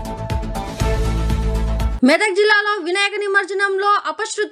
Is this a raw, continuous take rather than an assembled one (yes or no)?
yes